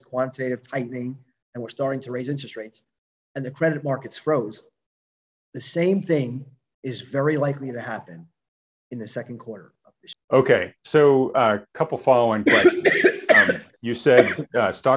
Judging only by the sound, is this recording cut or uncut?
uncut